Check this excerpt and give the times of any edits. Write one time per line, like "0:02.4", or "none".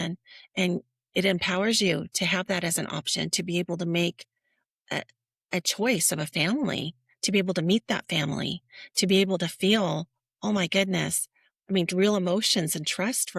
none